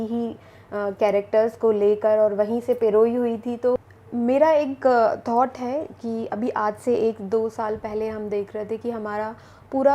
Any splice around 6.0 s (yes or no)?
no